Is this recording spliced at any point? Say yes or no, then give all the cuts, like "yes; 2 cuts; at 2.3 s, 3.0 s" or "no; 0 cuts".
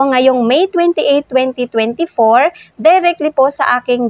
no; 0 cuts